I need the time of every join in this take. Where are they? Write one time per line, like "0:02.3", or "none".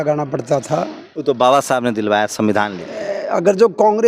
0:01.0